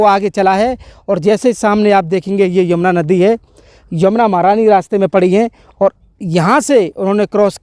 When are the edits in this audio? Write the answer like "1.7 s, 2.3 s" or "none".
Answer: none